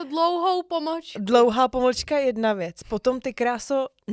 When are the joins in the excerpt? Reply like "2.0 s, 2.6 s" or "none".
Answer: none